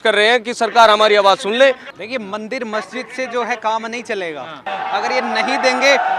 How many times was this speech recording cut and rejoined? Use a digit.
2